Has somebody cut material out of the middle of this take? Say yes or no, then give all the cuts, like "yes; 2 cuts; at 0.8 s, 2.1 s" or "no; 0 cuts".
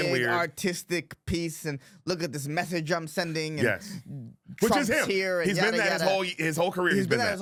no; 0 cuts